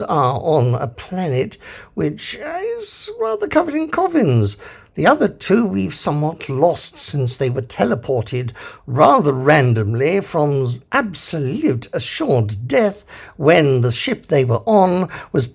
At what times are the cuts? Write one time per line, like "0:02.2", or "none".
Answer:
none